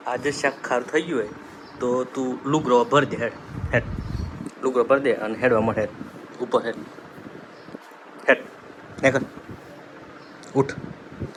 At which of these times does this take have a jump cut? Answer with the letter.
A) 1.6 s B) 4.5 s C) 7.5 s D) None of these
D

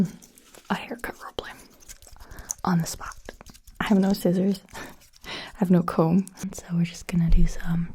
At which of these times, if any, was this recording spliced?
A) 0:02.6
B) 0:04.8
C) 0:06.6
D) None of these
C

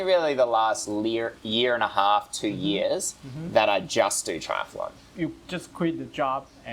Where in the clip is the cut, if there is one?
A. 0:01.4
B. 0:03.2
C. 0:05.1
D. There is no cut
D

